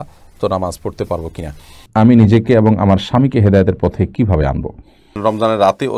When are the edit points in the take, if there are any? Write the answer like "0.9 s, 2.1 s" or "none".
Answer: 1.7 s, 5.1 s